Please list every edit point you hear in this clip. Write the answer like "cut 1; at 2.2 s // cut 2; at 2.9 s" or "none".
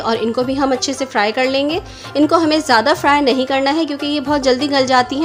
none